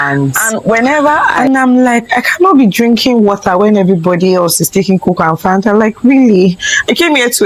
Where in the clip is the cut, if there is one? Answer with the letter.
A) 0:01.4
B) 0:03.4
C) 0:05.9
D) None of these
A